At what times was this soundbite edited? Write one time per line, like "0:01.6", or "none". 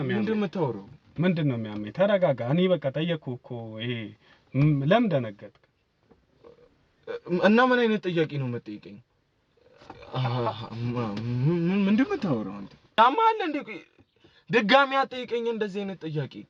0:13.0